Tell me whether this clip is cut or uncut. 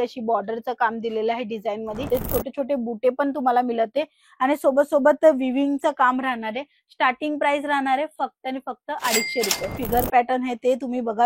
cut